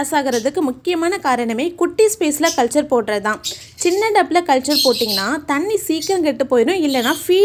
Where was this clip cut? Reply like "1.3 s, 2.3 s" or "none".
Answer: none